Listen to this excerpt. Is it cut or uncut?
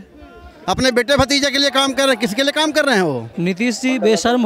cut